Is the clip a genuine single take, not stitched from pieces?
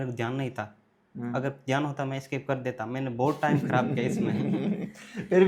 yes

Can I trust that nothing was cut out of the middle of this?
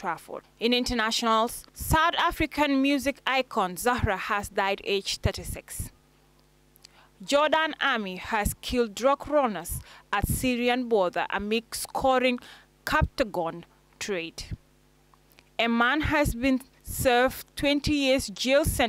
yes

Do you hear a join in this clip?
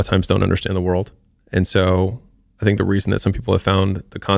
no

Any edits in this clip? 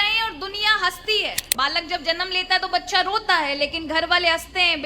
yes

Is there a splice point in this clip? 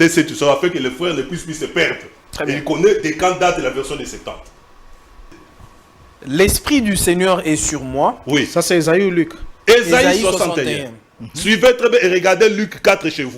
yes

